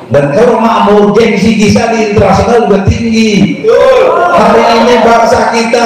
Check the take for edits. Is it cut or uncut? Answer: uncut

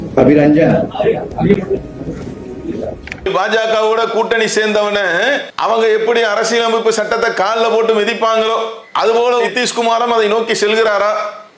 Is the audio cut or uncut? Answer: cut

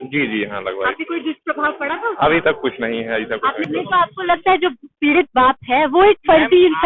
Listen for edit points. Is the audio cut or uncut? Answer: cut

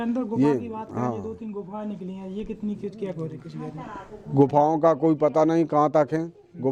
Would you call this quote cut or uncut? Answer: uncut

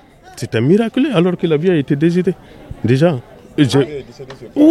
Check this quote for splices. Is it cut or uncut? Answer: uncut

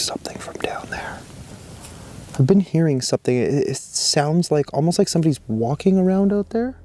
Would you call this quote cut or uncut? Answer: uncut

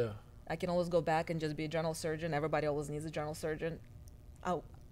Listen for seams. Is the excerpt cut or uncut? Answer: uncut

